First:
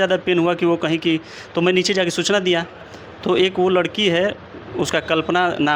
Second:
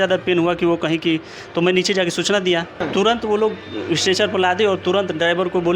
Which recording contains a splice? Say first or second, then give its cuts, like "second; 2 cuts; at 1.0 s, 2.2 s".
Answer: second; 1 cut; at 2.8 s